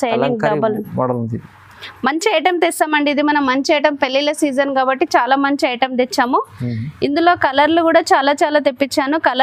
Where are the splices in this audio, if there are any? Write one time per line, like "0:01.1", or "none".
none